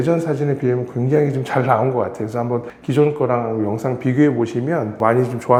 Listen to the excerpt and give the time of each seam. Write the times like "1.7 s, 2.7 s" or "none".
none